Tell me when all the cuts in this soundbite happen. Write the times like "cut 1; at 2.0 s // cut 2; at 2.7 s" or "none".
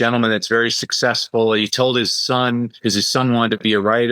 cut 1; at 2.7 s